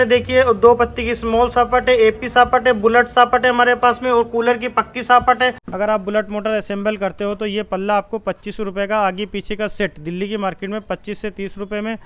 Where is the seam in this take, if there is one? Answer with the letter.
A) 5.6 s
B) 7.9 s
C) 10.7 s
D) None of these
A